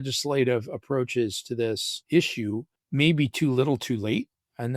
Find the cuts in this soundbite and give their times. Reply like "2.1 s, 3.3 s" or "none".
1.9 s, 2.8 s